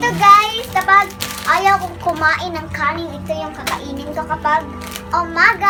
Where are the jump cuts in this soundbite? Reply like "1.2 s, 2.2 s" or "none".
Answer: none